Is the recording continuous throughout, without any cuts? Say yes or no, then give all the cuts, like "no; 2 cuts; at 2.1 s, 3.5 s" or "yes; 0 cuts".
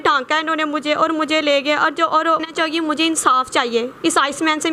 no; 1 cut; at 2.5 s